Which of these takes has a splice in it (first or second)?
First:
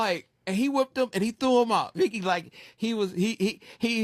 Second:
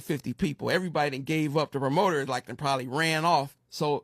second